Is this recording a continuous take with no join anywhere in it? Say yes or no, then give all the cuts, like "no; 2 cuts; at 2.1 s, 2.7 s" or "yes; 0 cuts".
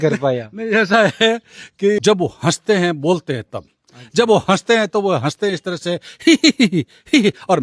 no; 1 cut; at 2.0 s